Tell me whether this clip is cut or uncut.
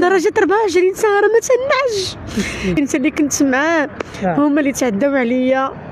cut